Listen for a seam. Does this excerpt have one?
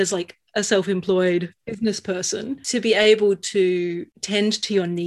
yes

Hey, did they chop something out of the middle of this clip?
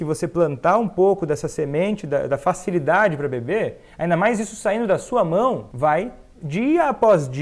yes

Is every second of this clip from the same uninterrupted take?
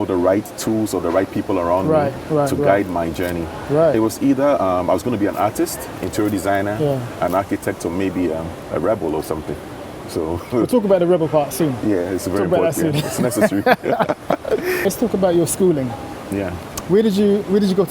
yes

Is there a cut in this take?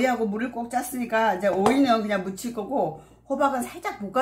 no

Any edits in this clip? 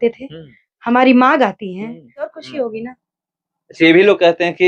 yes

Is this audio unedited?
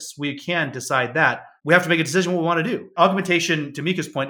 no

